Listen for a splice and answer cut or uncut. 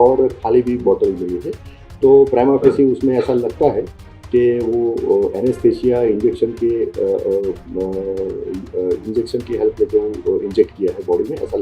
uncut